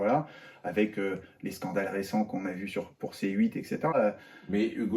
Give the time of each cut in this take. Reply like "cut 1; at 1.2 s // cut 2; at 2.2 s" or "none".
cut 1; at 3.9 s